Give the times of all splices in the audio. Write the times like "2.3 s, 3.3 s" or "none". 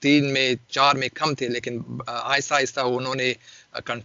none